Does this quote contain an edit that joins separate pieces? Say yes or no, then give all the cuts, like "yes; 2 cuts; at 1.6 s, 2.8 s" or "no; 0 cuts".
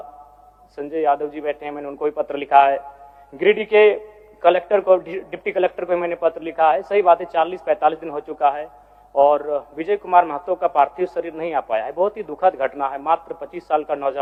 no; 0 cuts